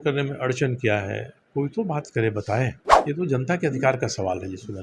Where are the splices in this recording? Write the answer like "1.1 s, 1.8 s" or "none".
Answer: 1.3 s, 2.9 s